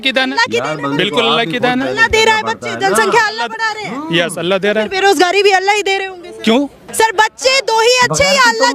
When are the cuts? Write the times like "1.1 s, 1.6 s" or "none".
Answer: 6.9 s